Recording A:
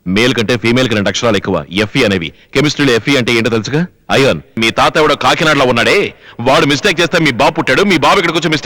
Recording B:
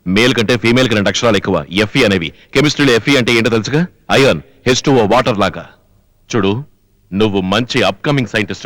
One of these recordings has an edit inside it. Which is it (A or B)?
A